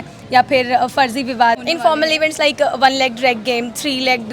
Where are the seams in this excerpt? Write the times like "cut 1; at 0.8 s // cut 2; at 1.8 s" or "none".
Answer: cut 1; at 1.6 s